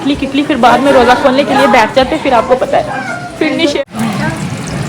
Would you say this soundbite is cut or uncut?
cut